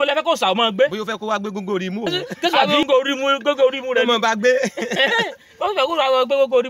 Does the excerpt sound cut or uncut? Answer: cut